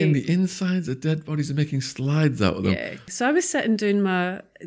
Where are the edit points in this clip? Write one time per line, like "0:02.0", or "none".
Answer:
0:03.1